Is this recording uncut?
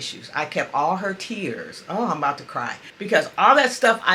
no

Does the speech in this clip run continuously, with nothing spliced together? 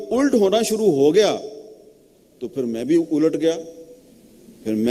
yes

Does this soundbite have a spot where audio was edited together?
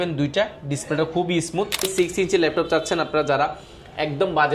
yes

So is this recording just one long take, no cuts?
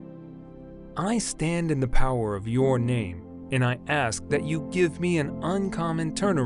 no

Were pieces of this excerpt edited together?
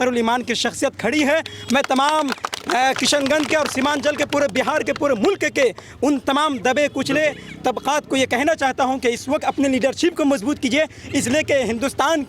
no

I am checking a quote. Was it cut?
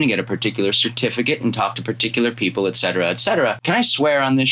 yes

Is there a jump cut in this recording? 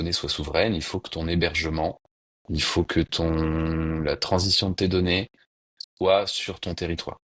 no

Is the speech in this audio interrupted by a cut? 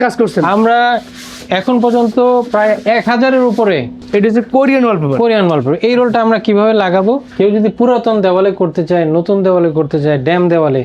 yes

